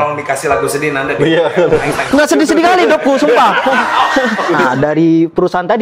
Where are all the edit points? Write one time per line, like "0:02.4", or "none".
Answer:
0:04.7